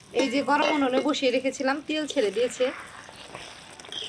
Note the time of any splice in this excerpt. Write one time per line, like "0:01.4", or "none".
none